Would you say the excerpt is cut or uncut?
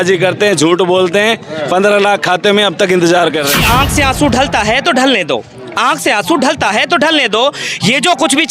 cut